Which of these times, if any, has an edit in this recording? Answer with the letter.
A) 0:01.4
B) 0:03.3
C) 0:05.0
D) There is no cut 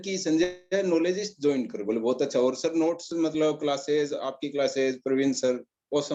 D